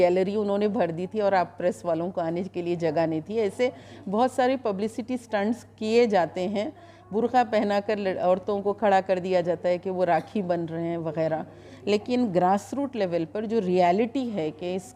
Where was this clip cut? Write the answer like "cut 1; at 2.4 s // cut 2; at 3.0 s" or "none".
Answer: none